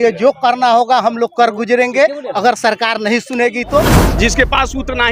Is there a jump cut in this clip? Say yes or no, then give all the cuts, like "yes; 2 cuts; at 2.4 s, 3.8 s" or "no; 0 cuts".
yes; 1 cut; at 3.9 s